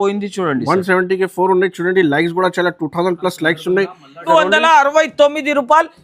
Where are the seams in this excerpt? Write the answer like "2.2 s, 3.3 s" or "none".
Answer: 4.2 s

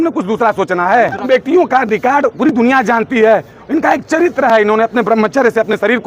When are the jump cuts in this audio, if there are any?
1.3 s

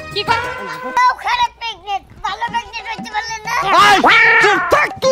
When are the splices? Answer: 1.0 s

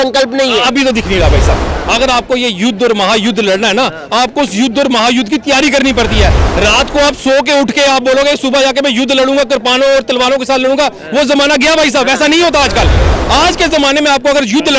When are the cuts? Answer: 1.6 s

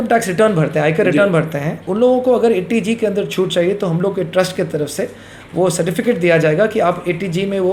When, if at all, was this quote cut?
none

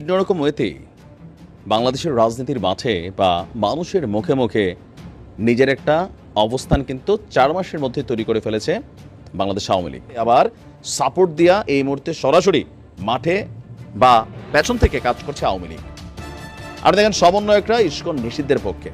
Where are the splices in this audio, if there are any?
10.2 s

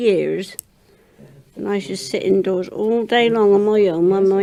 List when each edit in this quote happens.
none

